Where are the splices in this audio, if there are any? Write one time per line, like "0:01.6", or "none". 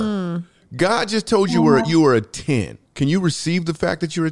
0:02.8